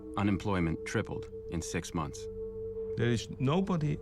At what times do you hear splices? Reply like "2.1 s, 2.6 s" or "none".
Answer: 2.4 s